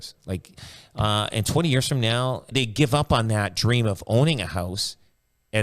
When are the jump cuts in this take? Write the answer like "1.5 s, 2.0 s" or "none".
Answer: 2.5 s